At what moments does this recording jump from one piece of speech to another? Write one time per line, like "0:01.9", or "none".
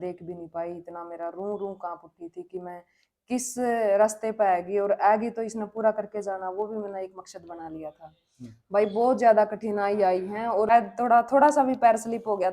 0:10.7